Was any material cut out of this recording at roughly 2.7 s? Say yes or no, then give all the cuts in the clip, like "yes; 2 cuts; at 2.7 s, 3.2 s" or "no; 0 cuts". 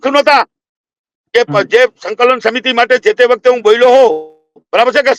no; 0 cuts